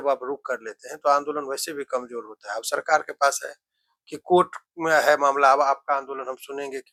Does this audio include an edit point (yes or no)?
no